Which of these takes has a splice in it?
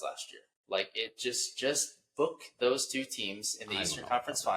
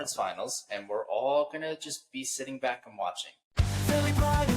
second; 1 cut; at 3.5 s

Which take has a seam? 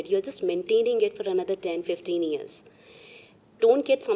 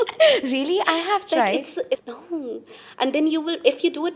second; 1 cut; at 2.1 s

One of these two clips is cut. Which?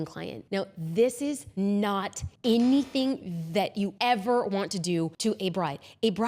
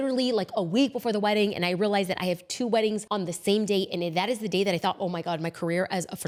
first; 4 cuts; at 1.5 s, 2.2 s, 3.9 s, 5.1 s

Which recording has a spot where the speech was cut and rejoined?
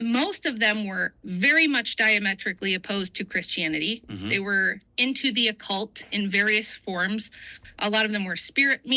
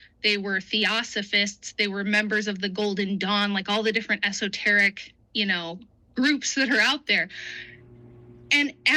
first; 1 cut; at 4.8 s

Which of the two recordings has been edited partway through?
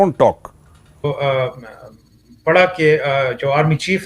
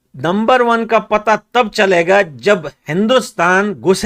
first; 1 cut; at 1.1 s

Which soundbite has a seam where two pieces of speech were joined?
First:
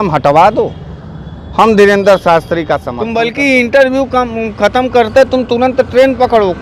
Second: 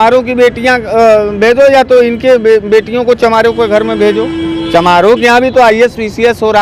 first; 1 cut; at 3.0 s

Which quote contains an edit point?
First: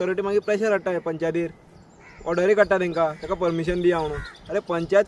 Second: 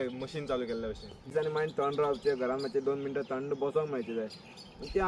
second; 1 cut; at 1.1 s

